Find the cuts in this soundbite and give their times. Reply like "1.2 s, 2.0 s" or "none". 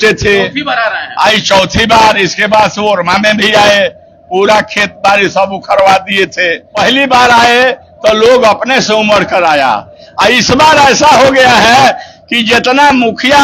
6.6 s

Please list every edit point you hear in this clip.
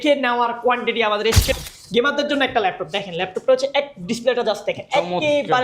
1.6 s

